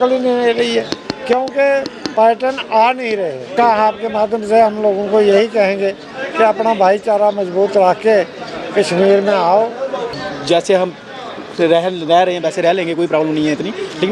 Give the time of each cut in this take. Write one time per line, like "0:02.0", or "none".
0:03.5
0:10.1